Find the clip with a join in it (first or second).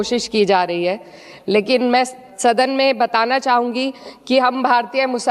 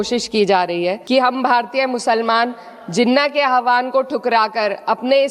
second